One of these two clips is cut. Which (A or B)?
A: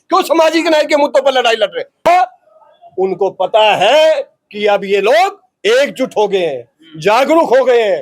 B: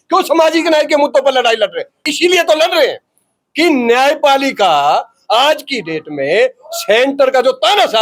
A